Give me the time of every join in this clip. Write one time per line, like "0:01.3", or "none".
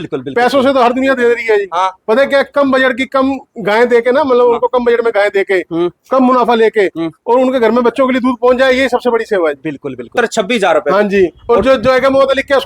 0:10.1